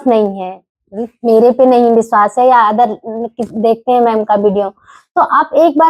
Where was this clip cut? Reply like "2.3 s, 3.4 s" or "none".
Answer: none